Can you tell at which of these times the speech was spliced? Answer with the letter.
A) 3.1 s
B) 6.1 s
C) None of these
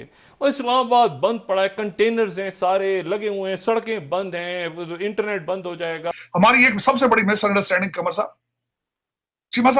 B